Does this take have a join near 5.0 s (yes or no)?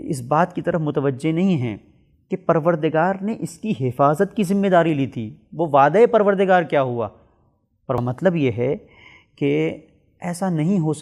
no